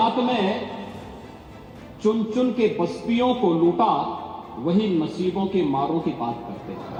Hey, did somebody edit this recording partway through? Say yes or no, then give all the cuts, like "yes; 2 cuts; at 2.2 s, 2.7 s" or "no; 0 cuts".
no; 0 cuts